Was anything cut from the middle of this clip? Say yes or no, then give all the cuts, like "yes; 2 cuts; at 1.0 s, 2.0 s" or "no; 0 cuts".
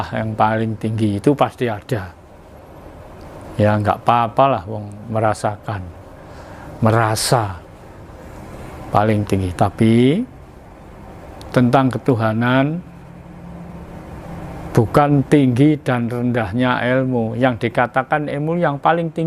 no; 0 cuts